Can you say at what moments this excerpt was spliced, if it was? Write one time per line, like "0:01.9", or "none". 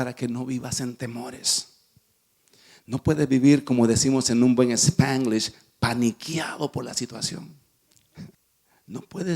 0:08.3